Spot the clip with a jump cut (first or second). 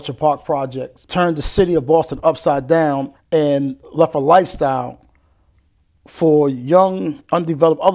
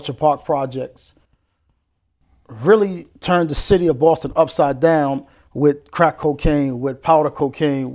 first